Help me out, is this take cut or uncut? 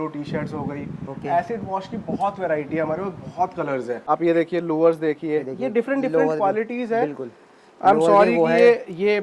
cut